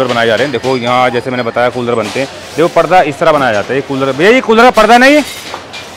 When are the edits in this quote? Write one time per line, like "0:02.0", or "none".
none